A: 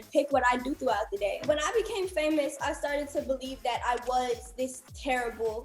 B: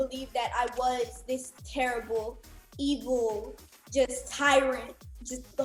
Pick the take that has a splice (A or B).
A